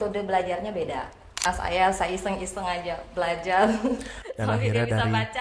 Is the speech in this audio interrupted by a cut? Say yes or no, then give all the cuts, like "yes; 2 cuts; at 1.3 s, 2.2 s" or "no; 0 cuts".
yes; 1 cut; at 1.4 s